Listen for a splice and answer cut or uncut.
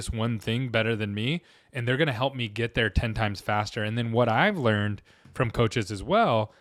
uncut